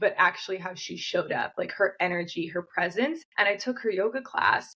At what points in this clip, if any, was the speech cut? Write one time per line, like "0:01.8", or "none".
0:03.3